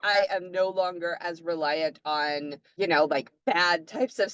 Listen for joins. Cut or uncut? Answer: cut